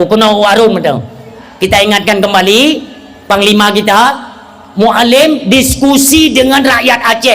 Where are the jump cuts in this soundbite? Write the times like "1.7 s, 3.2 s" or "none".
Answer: 1.4 s

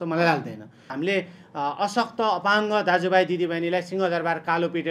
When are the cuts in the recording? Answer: 1.0 s

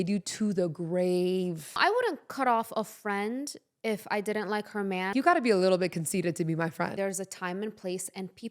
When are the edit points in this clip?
1.8 s, 5.1 s, 6.9 s

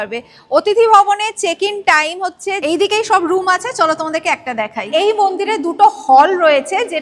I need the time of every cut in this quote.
2.6 s, 4.9 s

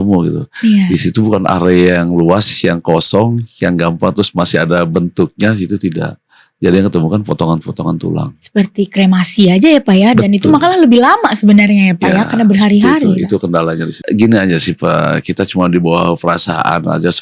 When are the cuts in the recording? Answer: 14.0 s

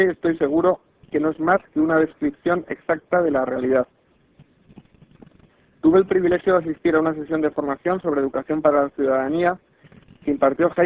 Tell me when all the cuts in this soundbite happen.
none

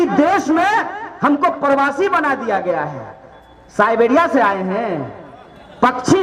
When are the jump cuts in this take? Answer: none

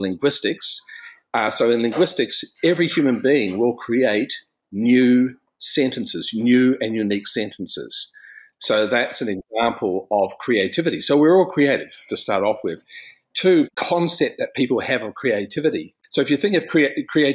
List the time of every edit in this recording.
13.6 s, 16.0 s

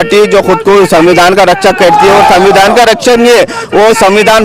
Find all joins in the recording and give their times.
none

